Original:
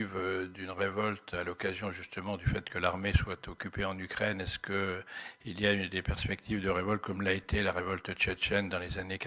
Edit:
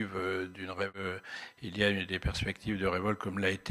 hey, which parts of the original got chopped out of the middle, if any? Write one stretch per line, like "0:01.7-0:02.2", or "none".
0:01.0-0:04.8